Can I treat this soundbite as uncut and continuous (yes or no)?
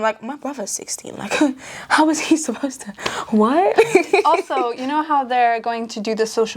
yes